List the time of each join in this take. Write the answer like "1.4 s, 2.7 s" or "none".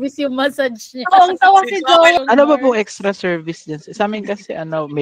2.2 s